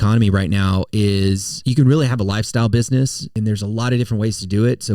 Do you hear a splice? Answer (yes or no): yes